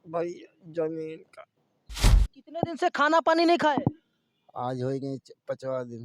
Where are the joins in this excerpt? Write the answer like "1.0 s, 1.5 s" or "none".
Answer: 2.1 s